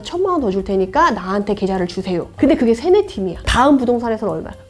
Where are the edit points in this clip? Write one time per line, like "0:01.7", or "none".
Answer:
0:02.3
0:03.5

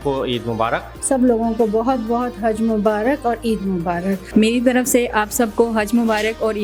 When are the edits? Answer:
0:00.9
0:04.3

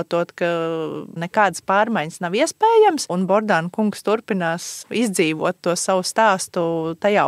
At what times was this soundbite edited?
0:01.2
0:03.1
0:04.8

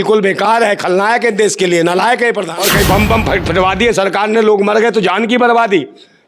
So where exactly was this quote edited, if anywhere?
0:02.5

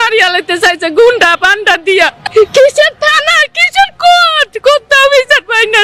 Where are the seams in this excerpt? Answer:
none

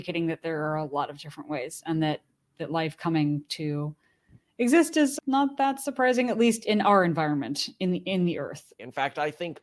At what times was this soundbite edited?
0:08.7

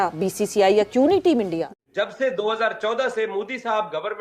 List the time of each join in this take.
0:01.7

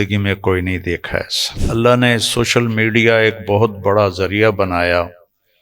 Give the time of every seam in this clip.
0:01.6

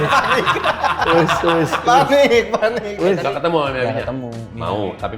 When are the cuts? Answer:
0:03.2

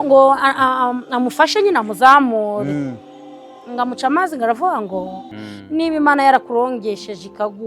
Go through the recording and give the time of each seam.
0:05.3

